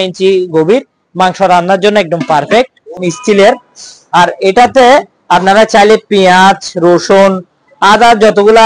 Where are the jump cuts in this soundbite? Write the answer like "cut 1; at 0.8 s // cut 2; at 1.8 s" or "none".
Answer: cut 1; at 3.0 s